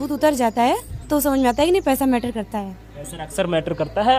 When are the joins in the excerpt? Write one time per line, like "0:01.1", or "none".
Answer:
none